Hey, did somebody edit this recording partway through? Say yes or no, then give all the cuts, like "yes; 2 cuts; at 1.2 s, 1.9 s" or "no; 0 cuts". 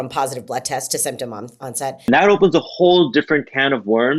yes; 1 cut; at 2.1 s